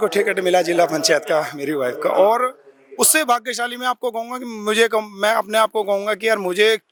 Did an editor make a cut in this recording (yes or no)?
no